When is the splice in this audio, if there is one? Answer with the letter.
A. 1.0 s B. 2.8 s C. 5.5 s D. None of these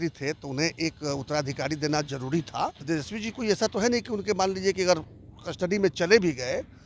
B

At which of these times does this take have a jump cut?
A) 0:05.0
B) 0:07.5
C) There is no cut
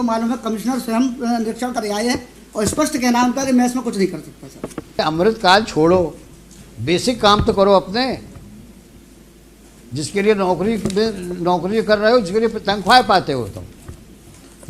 A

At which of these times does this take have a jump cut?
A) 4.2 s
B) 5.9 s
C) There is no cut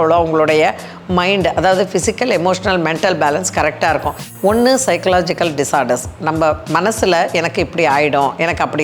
A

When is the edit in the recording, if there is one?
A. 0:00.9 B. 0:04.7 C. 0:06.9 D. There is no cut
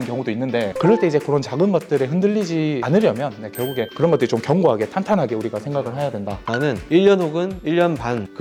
D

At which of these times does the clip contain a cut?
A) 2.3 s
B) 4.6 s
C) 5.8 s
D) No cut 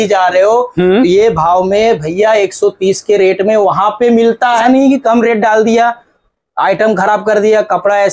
B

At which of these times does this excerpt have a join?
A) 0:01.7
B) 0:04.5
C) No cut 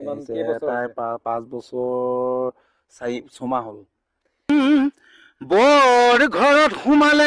B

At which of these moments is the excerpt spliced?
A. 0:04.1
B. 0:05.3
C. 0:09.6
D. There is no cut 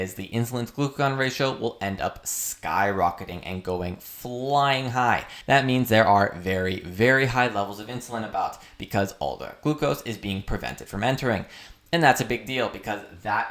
B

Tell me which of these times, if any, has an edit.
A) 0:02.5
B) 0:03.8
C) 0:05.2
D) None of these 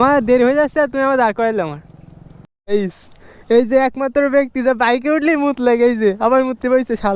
A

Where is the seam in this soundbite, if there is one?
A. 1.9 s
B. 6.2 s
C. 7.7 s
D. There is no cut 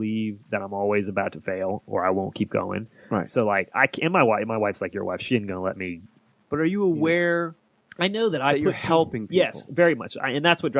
D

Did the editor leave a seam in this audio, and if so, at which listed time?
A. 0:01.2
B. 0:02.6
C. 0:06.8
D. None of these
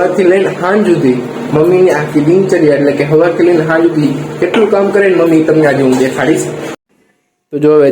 C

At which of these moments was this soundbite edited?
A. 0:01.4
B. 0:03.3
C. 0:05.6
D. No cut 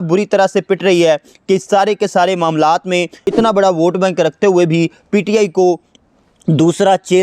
B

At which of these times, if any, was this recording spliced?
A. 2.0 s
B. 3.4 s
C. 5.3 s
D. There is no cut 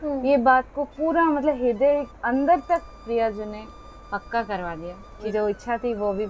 C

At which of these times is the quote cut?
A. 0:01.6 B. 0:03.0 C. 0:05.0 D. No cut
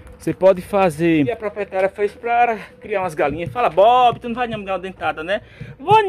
A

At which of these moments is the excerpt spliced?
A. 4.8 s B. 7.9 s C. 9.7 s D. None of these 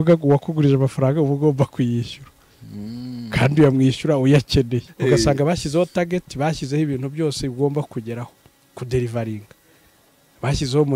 A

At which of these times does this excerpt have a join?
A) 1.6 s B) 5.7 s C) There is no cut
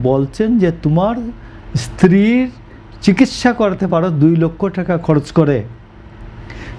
C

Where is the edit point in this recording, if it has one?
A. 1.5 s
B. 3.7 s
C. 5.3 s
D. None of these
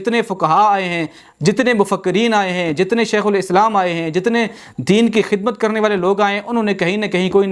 D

